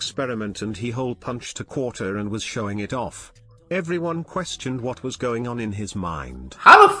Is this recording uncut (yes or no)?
yes